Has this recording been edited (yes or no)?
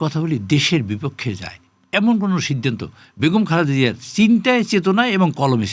no